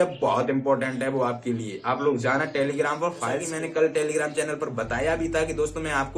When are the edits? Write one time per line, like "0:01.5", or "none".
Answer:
0:03.5